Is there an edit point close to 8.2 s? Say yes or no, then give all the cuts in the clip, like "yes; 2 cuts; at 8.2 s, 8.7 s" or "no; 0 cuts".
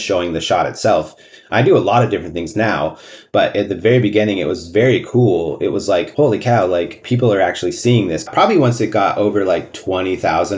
yes; 4 cuts; at 6.1 s, 7.0 s, 8.2 s, 9.7 s